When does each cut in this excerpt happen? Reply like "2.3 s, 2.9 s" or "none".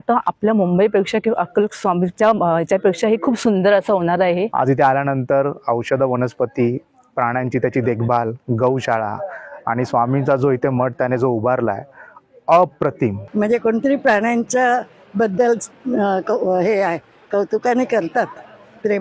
4.5 s, 13.2 s